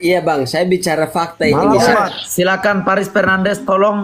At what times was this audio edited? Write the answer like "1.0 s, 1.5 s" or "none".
1.5 s